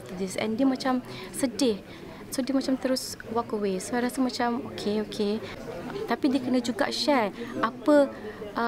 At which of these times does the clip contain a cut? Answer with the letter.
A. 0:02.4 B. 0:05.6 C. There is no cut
B